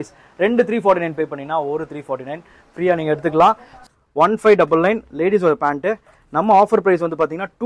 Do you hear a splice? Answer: yes; 1 cut; at 3.7 s

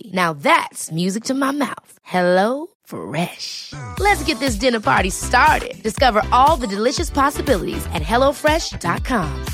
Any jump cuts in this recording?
no; 0 cuts

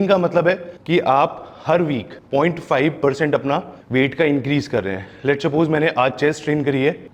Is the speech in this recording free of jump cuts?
yes; 0 cuts

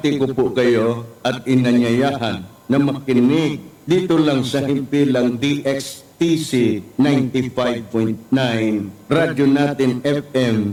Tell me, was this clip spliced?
no; 0 cuts

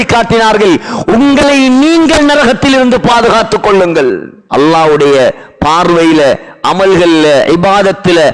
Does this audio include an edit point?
yes; 1 cut; at 4.3 s

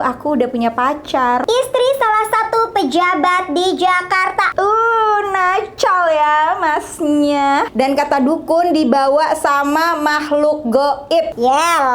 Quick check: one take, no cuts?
no; 2 cuts; at 1.5 s, 7.7 s

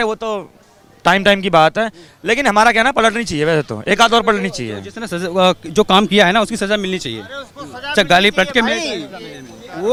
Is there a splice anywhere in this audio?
no; 0 cuts

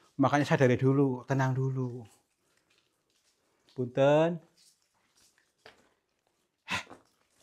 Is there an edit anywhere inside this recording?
no; 0 cuts

